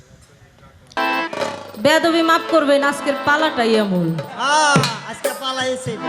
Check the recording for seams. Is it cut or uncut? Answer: cut